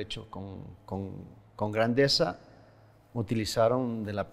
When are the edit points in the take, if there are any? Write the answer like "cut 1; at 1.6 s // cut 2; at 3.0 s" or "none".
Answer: none

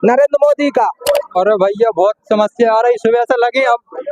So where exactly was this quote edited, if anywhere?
cut 1; at 1.4 s

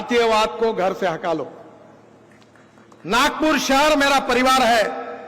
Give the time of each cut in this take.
none

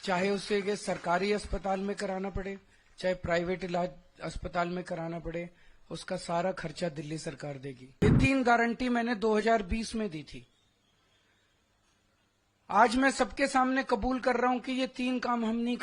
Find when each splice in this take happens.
cut 1; at 8.0 s

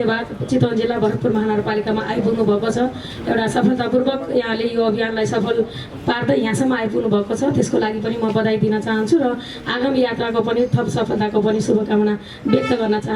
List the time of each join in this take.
none

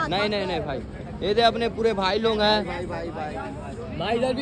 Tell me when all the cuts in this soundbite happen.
none

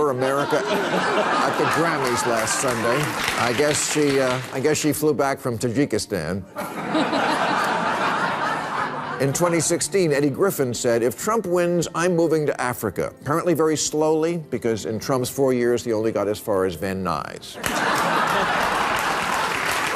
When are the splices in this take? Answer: cut 1; at 3.1 s

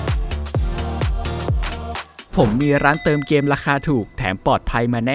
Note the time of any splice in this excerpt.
cut 1; at 2.2 s

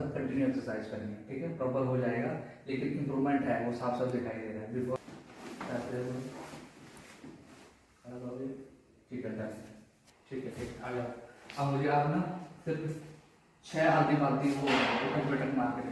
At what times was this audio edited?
none

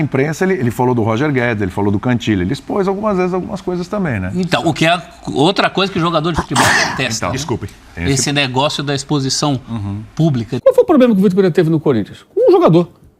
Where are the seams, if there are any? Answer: cut 1; at 10.6 s

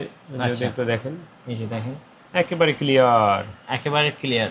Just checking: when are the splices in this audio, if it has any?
none

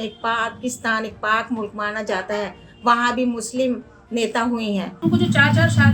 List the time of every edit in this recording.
cut 1; at 5.0 s

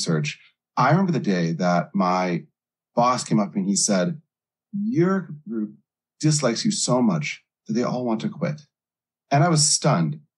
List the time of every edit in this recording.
none

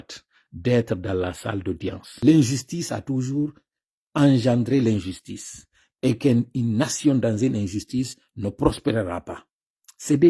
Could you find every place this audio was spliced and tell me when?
cut 1; at 2.0 s

